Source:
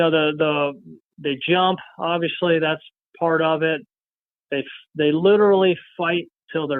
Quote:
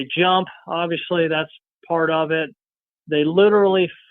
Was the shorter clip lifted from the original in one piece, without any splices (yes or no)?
no